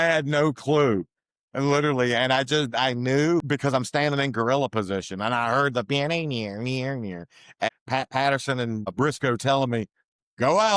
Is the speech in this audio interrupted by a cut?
yes; 3 cuts; at 3.5 s, 7.7 s, 8.9 s

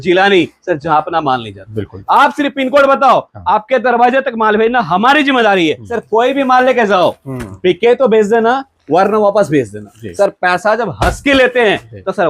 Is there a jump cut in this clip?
yes; 2 cuts; at 5.9 s, 10.0 s

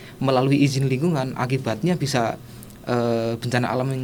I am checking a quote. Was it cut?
no; 0 cuts

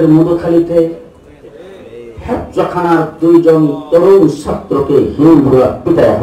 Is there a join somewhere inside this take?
no; 0 cuts

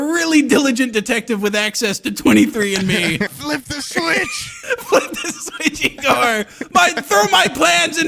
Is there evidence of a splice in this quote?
yes; 2 cuts; at 3.3 s, 4.5 s

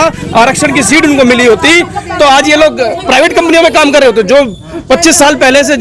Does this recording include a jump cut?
no; 0 cuts

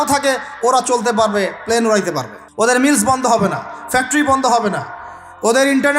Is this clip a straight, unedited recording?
no; 1 cut; at 2.4 s

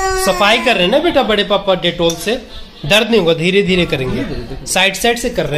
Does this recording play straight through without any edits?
yes; 0 cuts

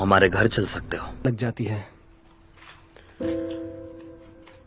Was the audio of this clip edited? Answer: yes; 1 cut; at 1.2 s

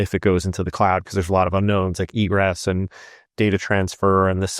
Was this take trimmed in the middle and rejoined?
no; 0 cuts

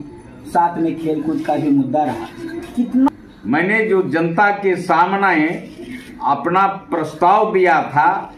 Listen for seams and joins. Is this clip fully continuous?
no; 1 cut; at 3.1 s

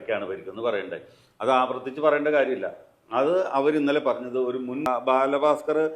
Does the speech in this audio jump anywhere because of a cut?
yes; 1 cut; at 4.9 s

